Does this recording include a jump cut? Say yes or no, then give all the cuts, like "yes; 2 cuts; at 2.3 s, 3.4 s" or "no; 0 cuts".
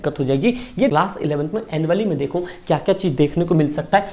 yes; 1 cut; at 0.9 s